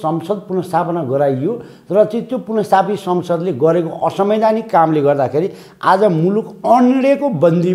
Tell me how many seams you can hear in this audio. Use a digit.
0